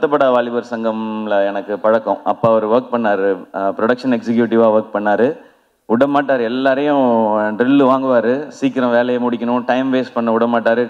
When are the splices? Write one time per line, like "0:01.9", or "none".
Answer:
none